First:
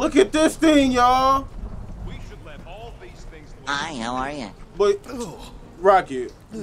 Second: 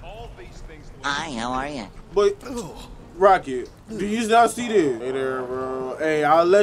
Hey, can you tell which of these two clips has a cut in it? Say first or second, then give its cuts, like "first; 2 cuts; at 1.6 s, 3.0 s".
second; 1 cut; at 5.0 s